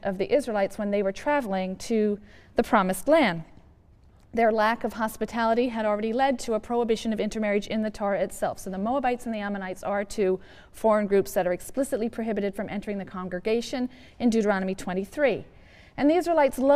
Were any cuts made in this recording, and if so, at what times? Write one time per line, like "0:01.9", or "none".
none